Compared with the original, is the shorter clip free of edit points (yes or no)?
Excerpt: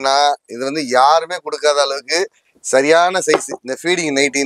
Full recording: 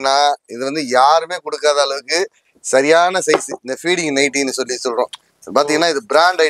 yes